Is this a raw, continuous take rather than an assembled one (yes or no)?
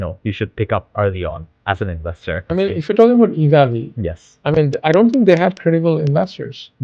no